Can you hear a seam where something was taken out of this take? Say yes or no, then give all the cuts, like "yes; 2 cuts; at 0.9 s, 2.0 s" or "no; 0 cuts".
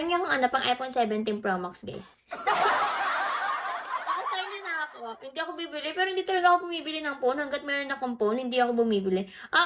no; 0 cuts